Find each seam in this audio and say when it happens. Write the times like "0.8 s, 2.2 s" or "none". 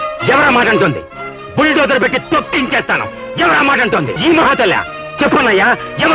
4.2 s